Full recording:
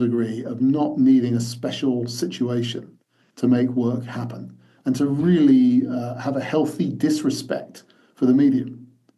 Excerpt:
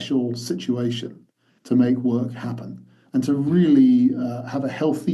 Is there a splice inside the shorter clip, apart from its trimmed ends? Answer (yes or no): no